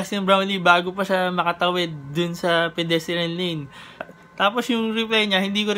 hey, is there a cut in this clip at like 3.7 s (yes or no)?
no